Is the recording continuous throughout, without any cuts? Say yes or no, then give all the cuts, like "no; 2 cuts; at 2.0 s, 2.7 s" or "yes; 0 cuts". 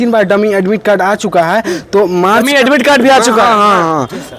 yes; 0 cuts